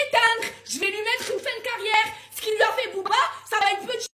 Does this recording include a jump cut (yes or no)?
no